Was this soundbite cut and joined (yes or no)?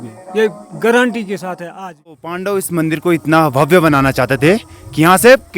yes